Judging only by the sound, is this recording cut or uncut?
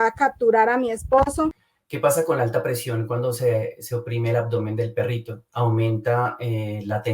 cut